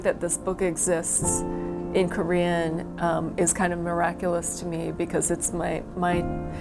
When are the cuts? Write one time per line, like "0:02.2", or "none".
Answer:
none